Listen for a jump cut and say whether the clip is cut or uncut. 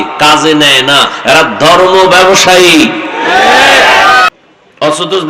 cut